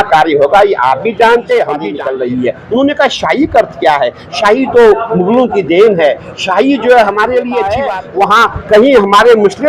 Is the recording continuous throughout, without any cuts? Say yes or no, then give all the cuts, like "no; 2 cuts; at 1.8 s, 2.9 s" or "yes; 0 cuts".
no; 2 cuts; at 2.0 s, 7.8 s